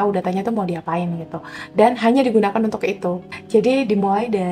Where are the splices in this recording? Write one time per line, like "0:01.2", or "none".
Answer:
0:03.2